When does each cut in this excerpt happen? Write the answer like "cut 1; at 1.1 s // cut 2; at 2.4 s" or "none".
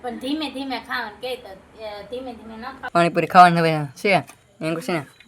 cut 1; at 2.8 s